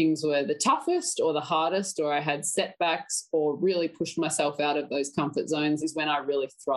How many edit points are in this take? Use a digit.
1